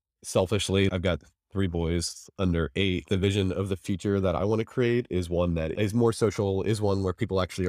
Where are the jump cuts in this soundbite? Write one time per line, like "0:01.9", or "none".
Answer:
0:00.9
0:03.0